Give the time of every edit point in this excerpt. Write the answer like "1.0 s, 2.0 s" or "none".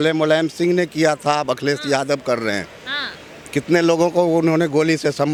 none